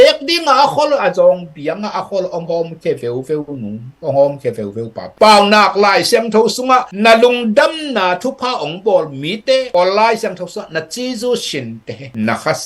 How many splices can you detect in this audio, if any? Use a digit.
1